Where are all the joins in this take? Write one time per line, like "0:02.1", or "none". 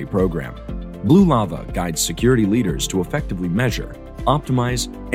none